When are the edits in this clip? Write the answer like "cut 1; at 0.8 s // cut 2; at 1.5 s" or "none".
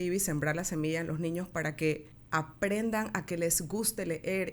cut 1; at 2.1 s